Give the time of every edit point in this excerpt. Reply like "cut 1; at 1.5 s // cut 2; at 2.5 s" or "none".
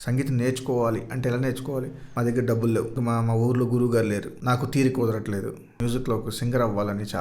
cut 1; at 2.0 s // cut 2; at 2.9 s // cut 3; at 4.3 s // cut 4; at 5.7 s